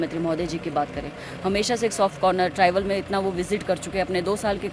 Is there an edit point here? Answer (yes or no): no